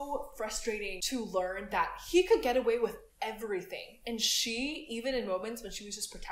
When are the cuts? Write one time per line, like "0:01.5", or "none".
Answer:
0:01.0